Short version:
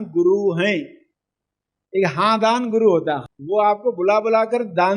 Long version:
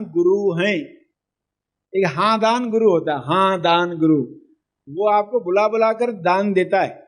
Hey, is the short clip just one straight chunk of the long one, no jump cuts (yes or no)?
no